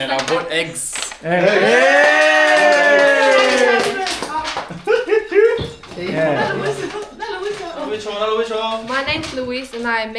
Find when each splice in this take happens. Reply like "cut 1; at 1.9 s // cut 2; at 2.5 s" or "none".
none